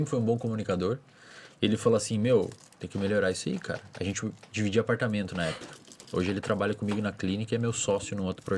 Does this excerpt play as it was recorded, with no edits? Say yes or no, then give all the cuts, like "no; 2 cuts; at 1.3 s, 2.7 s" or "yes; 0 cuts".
yes; 0 cuts